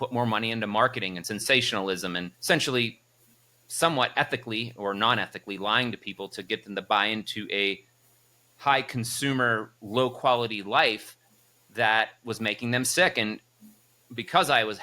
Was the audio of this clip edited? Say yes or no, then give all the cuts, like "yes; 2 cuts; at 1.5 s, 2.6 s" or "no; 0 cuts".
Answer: yes; 2 cuts; at 1.2 s, 2.3 s